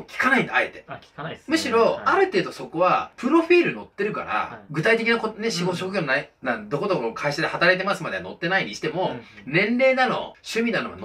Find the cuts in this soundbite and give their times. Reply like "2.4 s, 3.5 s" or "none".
none